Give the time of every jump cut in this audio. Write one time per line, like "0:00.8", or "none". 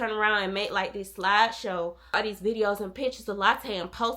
0:02.1

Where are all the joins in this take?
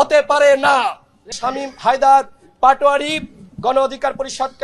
0:01.3

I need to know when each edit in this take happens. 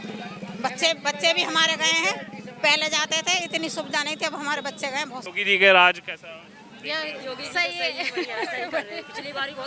0:05.3

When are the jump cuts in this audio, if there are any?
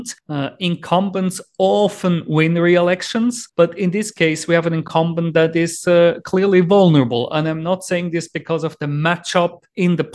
none

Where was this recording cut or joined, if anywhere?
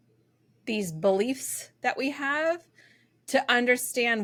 none

